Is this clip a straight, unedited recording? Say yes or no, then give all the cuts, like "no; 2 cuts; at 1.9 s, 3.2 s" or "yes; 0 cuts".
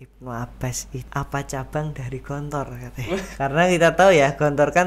no; 2 cuts; at 0.9 s, 3.3 s